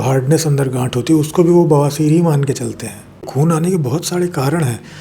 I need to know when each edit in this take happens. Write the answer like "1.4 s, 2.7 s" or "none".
3.3 s